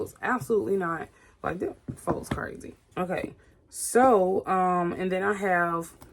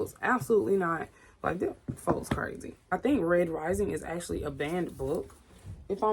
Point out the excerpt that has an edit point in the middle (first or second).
second